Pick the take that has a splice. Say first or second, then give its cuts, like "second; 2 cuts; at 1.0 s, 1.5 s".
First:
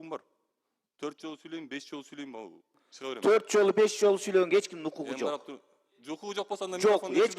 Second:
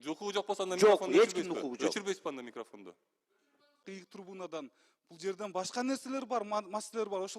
second; 1 cut; at 3.8 s